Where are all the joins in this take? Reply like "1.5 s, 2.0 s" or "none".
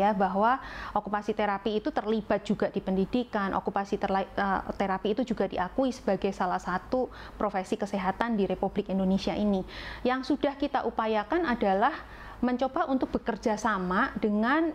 none